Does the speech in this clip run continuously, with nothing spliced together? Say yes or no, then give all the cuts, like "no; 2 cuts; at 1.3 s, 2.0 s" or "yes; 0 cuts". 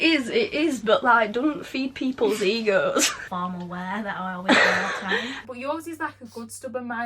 no; 2 cuts; at 3.2 s, 5.3 s